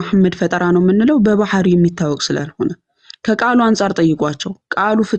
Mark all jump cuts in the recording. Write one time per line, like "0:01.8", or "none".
none